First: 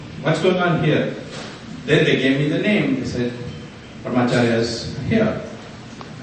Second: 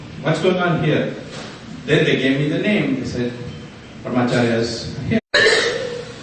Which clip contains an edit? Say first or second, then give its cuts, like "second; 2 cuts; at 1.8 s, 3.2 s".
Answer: first; 1 cut; at 5.2 s